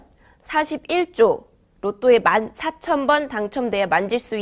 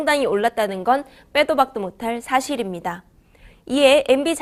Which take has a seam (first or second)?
first